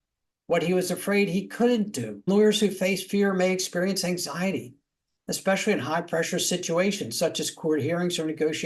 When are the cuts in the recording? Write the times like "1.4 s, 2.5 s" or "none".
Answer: 2.3 s

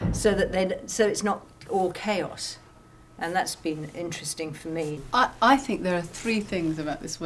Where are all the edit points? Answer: 5.0 s

